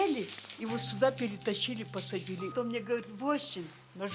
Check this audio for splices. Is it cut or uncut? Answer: cut